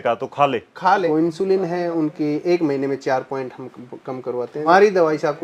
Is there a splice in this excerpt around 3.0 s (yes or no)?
no